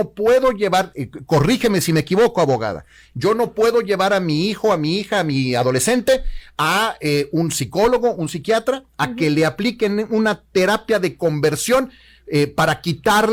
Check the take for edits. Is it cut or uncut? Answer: uncut